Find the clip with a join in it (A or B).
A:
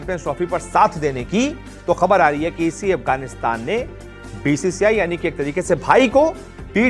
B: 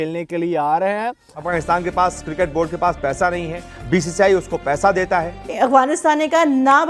B